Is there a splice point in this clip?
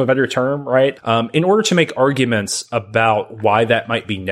yes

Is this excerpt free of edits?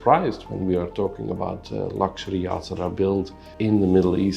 no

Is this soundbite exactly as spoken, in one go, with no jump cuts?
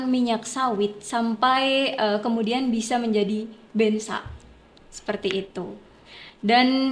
yes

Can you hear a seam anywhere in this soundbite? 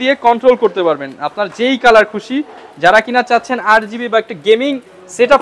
no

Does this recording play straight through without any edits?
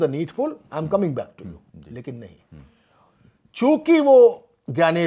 no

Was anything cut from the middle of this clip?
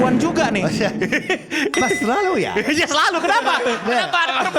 no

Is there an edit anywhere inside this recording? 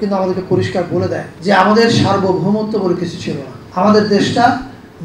yes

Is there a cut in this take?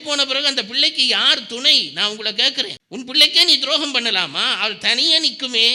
no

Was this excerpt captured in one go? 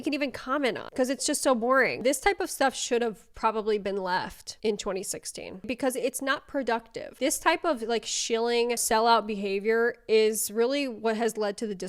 no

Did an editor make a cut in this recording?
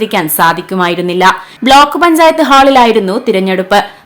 yes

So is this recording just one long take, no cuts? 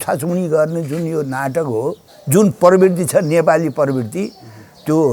no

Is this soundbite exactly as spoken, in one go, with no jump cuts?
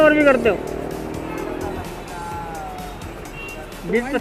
yes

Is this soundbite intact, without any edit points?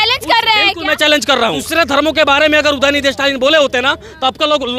yes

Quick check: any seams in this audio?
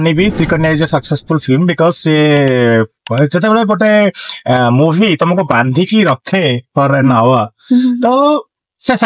no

